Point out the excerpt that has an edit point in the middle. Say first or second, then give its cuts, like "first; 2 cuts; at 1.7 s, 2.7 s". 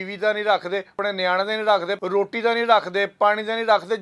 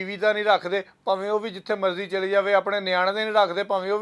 first; 2 cuts; at 1.0 s, 1.9 s